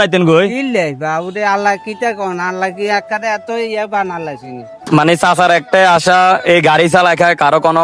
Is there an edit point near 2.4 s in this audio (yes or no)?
no